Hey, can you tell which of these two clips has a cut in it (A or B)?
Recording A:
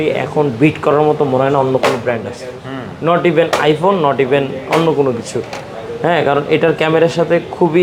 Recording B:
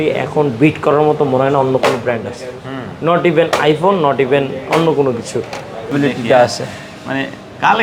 B